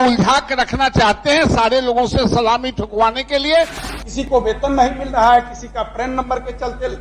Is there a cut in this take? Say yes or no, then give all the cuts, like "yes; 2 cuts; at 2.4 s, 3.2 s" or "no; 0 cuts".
yes; 1 cut; at 3.8 s